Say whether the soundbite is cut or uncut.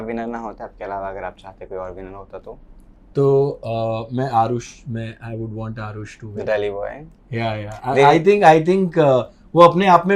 uncut